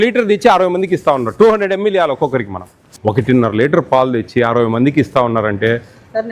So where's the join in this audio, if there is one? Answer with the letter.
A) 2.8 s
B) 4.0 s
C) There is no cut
A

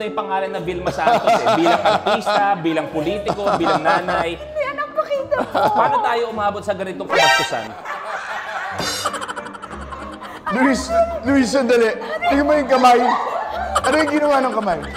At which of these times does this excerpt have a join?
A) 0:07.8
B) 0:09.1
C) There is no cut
C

